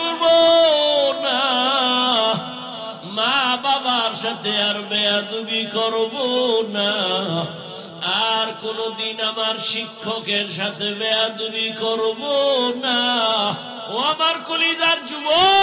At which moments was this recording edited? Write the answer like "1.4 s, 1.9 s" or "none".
13.7 s